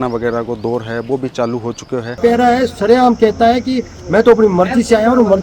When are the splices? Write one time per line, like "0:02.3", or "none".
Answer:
0:02.2